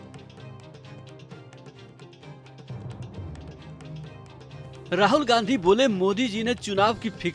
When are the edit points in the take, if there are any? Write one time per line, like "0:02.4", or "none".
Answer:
0:04.9